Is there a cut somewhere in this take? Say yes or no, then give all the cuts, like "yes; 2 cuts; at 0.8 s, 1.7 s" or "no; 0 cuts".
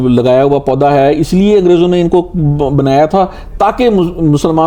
no; 0 cuts